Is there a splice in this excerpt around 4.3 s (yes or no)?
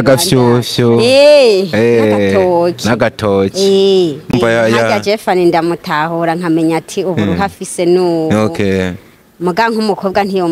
yes